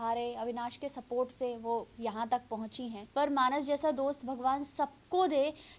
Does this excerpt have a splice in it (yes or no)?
yes